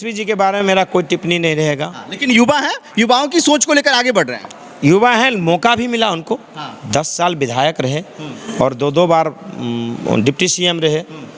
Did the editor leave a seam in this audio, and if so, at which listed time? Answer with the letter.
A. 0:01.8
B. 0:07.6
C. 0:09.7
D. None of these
D